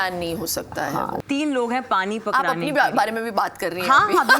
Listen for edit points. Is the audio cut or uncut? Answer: cut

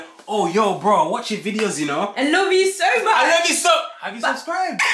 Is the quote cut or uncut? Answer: uncut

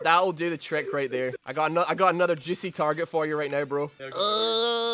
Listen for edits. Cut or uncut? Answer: cut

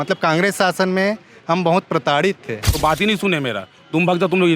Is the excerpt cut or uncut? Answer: cut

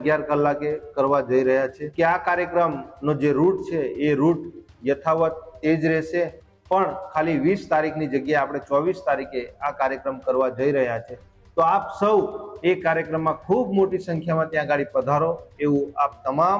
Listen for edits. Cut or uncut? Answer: cut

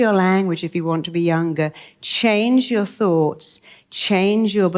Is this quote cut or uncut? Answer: uncut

